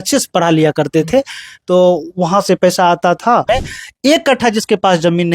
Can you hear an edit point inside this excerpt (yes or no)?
yes